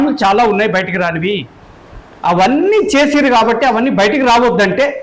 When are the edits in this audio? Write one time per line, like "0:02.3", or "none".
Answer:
none